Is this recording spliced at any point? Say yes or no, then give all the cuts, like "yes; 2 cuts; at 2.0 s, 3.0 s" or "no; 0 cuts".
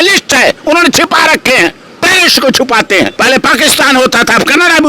yes; 1 cut; at 3.1 s